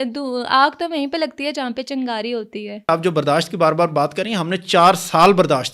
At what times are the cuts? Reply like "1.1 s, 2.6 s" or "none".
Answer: 2.9 s